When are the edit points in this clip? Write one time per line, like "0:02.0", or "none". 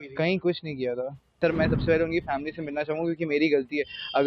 0:01.3